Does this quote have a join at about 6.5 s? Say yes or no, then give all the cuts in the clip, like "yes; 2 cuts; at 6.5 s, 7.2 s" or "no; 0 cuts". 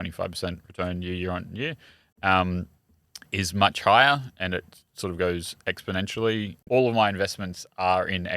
yes; 1 cut; at 6.5 s